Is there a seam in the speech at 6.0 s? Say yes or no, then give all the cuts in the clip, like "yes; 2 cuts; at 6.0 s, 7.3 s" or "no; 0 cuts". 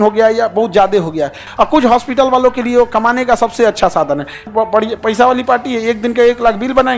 no; 2 cuts; at 1.4 s, 4.5 s